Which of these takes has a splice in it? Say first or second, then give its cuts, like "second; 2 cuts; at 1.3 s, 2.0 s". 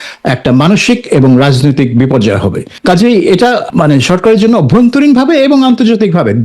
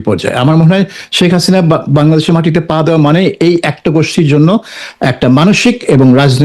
first; 2 cuts; at 2.7 s, 3.7 s